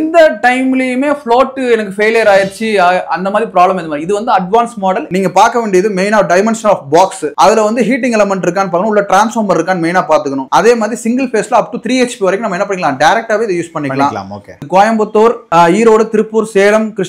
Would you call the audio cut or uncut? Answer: cut